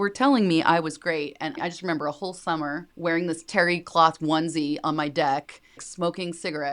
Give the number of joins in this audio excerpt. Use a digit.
3